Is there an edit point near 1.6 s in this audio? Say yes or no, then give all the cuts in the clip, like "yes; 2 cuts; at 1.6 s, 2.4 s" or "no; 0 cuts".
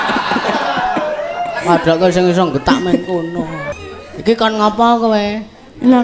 no; 1 cut; at 3.8 s